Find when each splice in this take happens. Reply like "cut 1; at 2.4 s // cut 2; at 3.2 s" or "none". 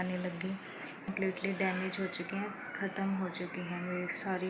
cut 1; at 1.1 s